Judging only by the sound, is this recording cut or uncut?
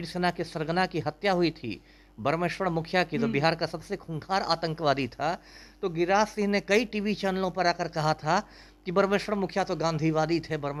uncut